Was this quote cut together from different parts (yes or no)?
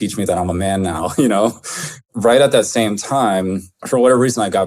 yes